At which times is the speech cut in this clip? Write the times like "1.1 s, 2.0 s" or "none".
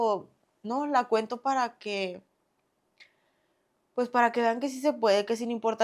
none